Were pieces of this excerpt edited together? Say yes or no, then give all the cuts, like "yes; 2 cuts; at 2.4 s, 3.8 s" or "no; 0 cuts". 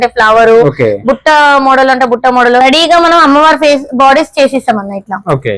yes; 1 cut; at 2.6 s